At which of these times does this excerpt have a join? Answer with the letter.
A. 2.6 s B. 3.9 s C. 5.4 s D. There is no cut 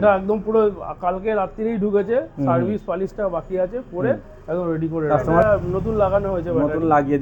C